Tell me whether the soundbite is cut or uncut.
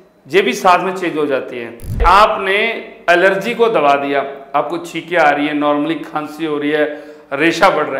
cut